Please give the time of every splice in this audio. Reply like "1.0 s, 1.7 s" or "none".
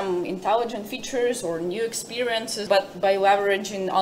2.6 s